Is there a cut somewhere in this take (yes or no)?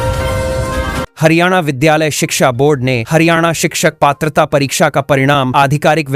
yes